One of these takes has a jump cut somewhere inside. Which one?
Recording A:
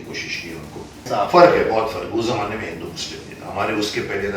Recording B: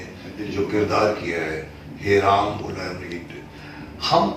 A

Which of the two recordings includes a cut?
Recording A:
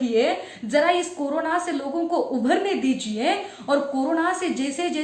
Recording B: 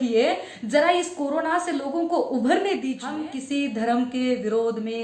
B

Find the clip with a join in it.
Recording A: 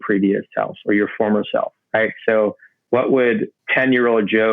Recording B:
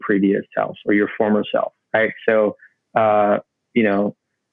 A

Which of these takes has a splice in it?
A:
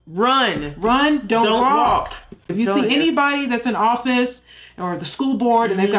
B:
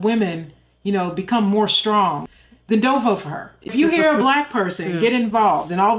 B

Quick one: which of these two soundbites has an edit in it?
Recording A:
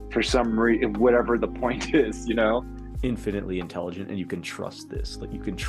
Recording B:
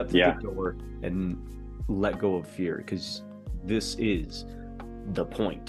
A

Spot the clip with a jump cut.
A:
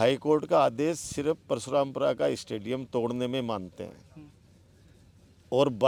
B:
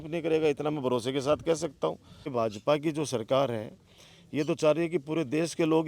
B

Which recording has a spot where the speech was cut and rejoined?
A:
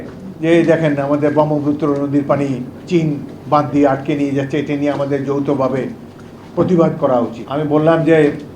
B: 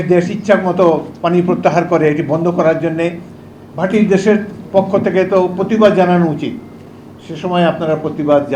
A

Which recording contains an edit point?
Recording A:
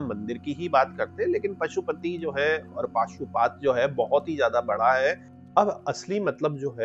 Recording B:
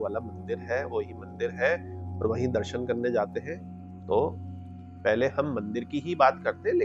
A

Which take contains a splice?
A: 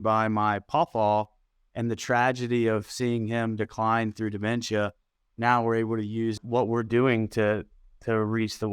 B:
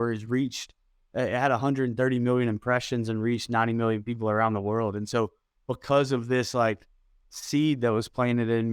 A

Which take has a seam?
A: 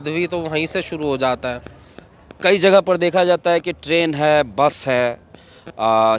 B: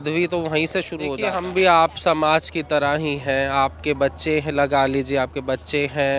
B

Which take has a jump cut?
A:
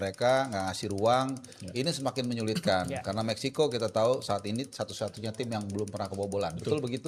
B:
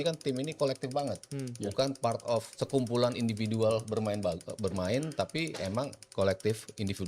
B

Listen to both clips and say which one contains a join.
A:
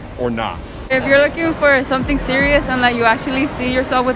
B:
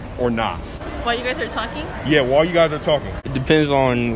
A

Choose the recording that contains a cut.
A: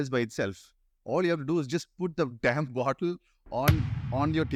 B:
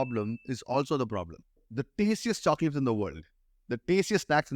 B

